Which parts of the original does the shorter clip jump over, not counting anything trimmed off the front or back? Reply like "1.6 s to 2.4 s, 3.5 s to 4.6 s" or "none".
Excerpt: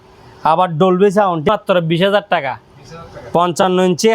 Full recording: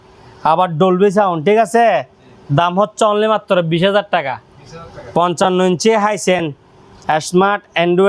1.5 s to 3.3 s